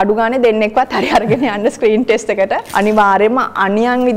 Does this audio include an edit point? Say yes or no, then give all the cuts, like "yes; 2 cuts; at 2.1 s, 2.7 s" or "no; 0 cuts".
yes; 1 cut; at 2.6 s